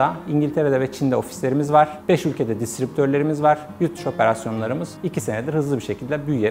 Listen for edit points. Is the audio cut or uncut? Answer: uncut